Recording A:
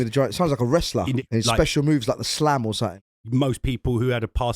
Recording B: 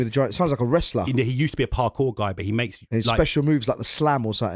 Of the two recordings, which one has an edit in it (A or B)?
A